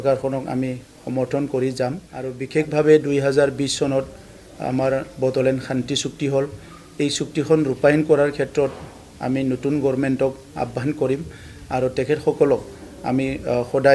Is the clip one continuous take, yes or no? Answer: no